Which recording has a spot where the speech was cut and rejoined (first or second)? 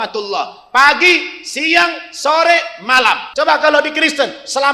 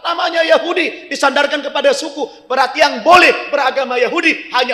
first